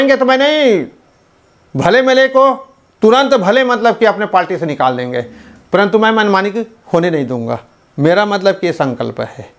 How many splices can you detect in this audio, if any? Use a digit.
0